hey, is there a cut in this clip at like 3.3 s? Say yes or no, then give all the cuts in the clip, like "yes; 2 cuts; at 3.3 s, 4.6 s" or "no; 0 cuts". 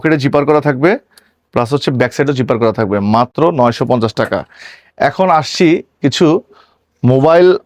no; 0 cuts